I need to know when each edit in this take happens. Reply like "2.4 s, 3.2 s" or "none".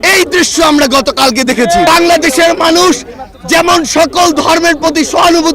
1.9 s